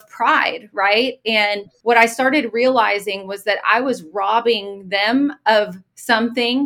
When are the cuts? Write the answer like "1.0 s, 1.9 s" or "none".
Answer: 1.7 s